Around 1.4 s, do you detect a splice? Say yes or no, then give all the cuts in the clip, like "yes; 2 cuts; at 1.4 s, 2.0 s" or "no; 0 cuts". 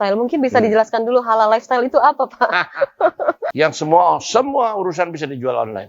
no; 1 cut; at 3.5 s